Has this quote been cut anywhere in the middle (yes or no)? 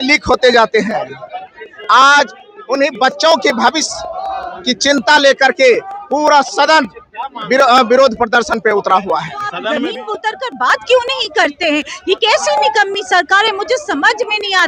yes